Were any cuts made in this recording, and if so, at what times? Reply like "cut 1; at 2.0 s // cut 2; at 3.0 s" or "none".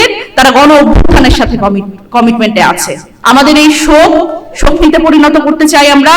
cut 1; at 3.1 s